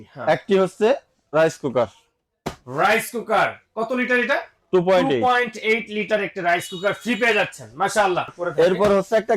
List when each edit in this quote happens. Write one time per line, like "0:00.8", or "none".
0:08.4

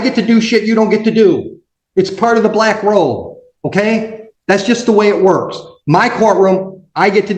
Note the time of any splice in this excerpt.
none

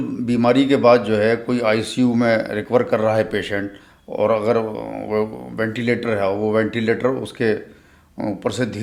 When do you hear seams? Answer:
none

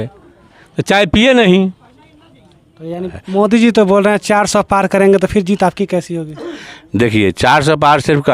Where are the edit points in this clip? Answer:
0:03.0

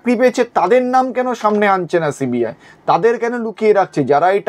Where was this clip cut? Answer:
none

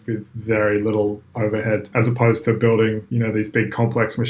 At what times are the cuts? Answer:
0:01.9
0:03.1

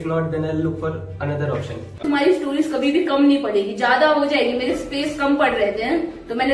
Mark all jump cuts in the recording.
0:02.0

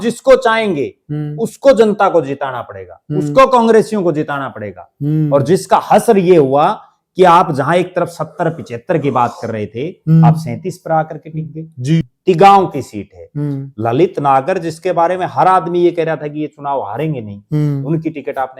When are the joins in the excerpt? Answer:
0:12.0

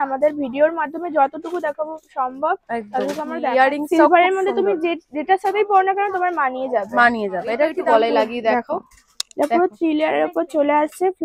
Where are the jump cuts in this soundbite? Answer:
0:03.3
0:07.8

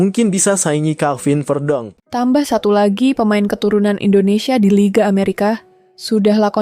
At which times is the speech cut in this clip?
0:02.0

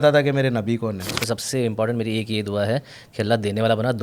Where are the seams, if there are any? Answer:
0:01.2

